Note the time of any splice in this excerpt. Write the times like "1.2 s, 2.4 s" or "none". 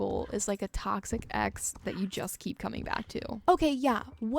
3.3 s